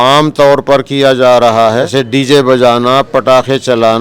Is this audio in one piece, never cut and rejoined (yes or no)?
no